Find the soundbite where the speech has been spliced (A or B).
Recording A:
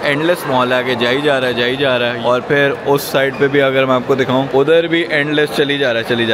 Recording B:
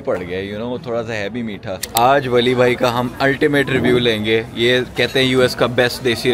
B